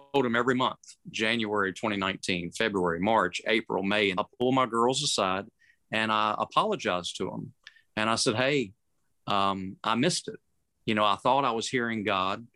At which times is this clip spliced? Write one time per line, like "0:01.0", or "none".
0:04.1